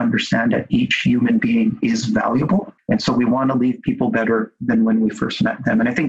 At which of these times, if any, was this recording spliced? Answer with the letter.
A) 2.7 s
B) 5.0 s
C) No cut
A